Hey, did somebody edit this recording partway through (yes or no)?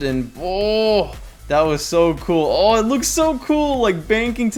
no